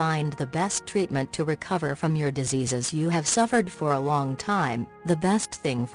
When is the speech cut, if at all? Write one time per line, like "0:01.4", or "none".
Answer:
0:01.2